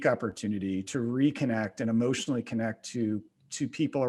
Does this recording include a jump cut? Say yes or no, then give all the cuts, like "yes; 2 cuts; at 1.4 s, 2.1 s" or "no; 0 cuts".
no; 0 cuts